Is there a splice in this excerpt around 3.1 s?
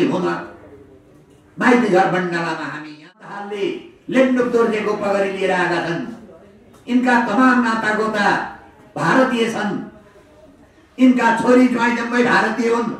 yes; 1 cut; at 3.1 s

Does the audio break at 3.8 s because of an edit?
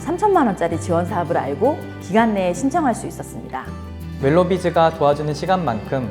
yes; 1 cut; at 3.8 s

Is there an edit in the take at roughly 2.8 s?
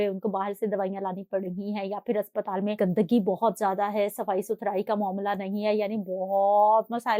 yes; 1 cut; at 2.8 s

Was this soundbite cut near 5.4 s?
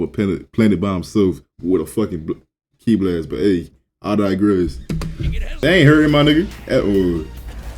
yes; 1 cut; at 5.4 s

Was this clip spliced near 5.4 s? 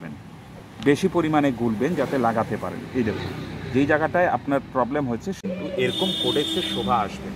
yes; 1 cut; at 5.4 s

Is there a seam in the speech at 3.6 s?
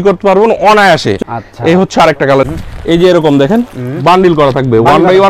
no; 2 cuts; at 1.2 s, 2.4 s

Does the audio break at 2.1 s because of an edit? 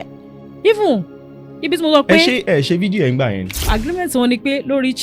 no; 1 cut; at 3.7 s

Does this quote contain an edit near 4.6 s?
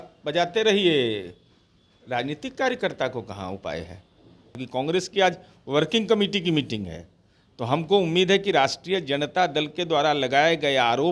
yes; 1 cut; at 4.6 s

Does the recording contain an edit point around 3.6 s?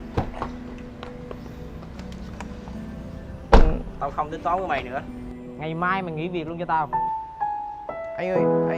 no; 1 cut; at 6.9 s

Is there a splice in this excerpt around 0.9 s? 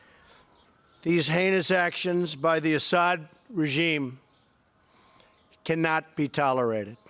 no; 1 cut; at 3.2 s

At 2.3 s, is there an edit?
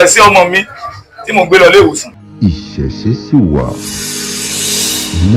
yes; 1 cut; at 2.3 s

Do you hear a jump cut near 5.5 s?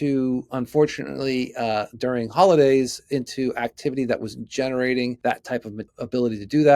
yes; 1 cut; at 5.5 s

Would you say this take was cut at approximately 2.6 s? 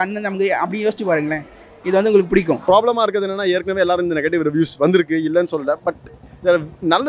yes; 1 cut; at 2.6 s

